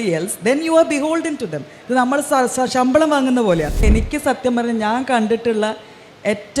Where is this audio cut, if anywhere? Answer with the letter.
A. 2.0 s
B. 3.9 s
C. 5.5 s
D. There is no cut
B